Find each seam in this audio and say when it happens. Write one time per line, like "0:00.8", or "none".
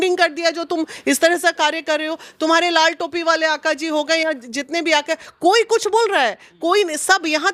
none